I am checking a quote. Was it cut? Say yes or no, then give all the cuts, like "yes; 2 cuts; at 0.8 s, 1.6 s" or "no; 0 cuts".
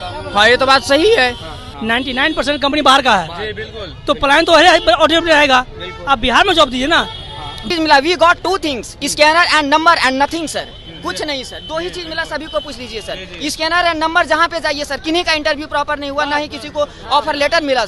yes; 2 cuts; at 1.6 s, 7.7 s